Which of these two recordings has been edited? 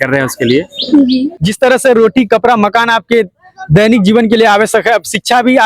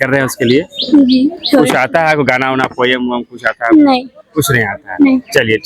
first; 1 cut; at 1.3 s

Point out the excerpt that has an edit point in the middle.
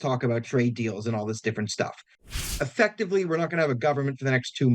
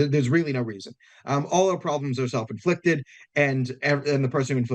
first; 1 cut; at 2.3 s

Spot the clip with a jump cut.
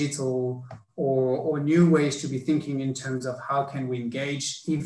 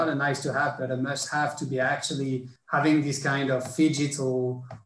second; 1 cut; at 2.5 s

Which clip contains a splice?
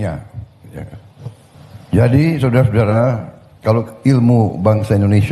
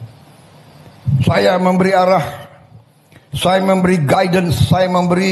first; 1 cut; at 1.5 s

